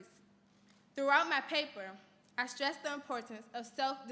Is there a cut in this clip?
no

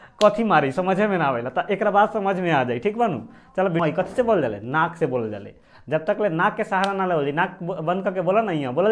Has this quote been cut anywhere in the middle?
yes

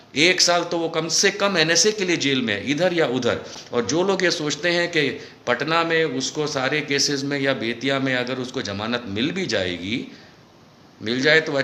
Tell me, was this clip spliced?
no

